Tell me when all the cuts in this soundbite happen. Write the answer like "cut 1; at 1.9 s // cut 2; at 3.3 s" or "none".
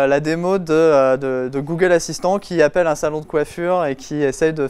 none